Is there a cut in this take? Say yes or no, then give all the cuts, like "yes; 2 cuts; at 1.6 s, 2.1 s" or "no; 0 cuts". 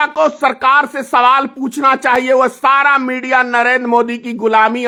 no; 0 cuts